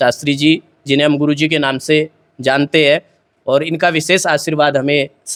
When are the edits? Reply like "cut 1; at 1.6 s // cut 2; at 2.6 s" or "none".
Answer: none